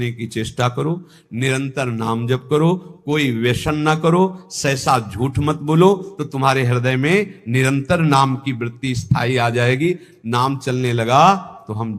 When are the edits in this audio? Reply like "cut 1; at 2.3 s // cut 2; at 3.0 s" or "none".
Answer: none